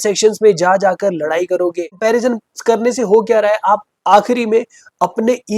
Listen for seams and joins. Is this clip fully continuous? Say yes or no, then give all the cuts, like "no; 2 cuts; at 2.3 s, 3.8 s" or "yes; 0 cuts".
no; 1 cut; at 2.0 s